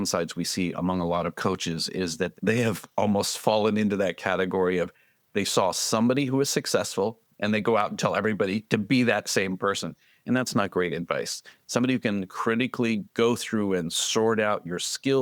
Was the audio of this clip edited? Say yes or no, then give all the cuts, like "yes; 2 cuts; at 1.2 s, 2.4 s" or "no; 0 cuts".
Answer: yes; 1 cut; at 2.3 s